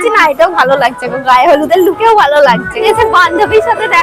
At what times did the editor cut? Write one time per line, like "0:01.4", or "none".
0:02.7